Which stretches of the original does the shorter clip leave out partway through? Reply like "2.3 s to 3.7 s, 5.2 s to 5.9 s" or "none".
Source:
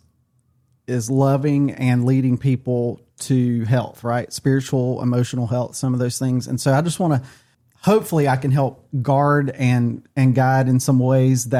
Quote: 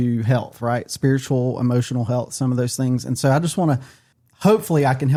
none